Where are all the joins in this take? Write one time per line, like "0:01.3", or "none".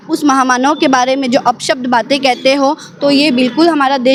none